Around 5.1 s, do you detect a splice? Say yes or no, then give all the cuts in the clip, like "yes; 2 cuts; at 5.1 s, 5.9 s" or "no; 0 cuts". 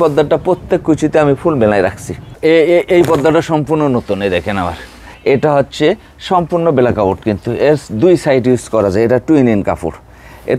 yes; 2 cuts; at 2.4 s, 5.1 s